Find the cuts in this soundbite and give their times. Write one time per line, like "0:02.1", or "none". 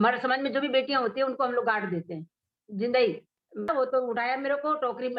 0:03.7